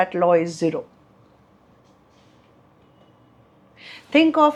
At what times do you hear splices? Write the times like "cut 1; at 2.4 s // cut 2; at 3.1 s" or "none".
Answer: none